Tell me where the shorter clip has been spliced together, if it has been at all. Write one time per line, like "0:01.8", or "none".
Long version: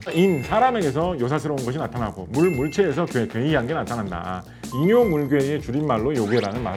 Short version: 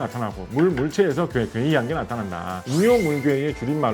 0:02.5